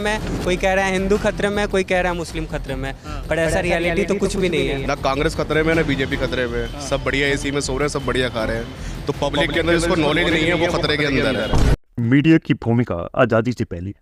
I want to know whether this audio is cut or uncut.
uncut